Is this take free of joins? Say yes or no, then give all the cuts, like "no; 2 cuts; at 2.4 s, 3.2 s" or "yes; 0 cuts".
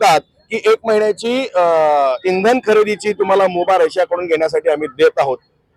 yes; 0 cuts